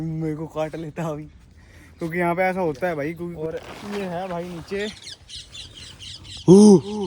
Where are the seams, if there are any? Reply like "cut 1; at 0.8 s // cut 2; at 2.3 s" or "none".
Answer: cut 1; at 3.3 s